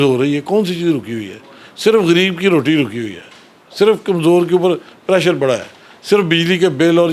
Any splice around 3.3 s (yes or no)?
no